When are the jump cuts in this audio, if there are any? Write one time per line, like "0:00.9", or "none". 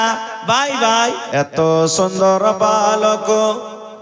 0:01.2

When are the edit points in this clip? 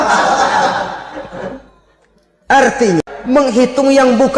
0:03.0

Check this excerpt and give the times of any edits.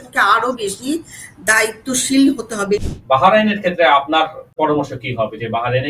0:02.9
0:04.6

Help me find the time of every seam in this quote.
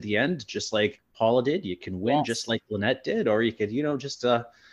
0:01.0

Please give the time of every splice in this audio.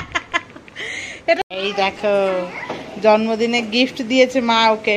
0:01.4

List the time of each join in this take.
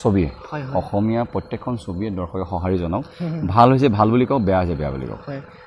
none

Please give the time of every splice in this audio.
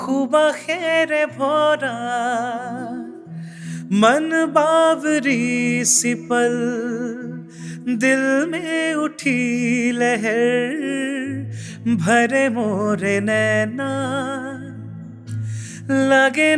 none

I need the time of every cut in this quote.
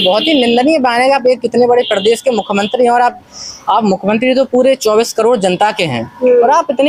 none

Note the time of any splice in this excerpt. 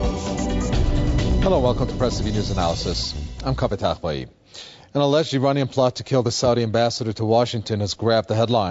0:01.1

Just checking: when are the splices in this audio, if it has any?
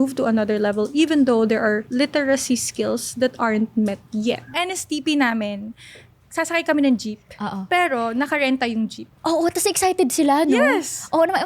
0:04.6
0:09.1

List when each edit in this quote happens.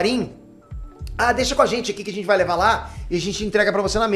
none

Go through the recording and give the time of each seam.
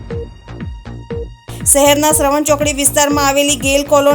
0:01.1

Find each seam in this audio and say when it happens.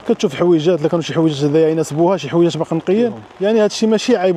none

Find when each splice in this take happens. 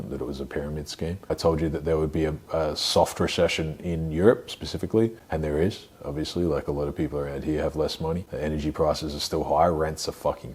0:01.3
0:05.2
0:08.3

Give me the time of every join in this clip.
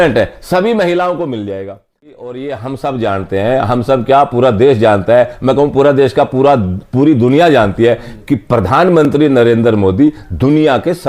0:02.1

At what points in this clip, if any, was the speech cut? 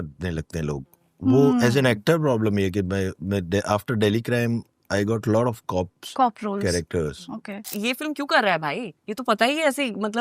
0:07.7

